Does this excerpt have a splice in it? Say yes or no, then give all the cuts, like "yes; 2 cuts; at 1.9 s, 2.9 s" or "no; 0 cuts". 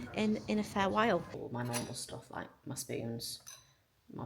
yes; 1 cut; at 1.4 s